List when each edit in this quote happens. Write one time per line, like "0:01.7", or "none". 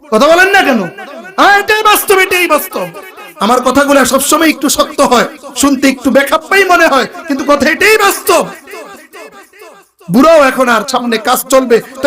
0:10.9